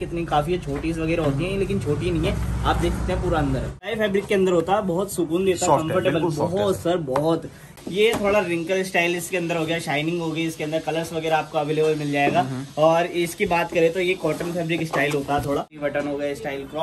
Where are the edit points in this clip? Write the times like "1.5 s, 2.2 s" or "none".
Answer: 3.9 s, 7.6 s, 15.7 s